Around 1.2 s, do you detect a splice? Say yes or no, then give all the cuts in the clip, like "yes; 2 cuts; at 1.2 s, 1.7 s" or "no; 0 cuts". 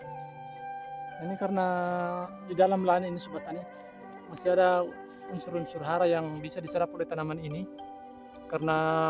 yes; 1 cut; at 1.2 s